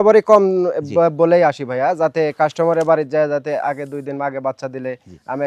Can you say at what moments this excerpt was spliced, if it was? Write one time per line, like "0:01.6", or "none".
none